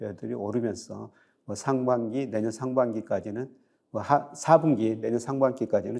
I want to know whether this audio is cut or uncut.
uncut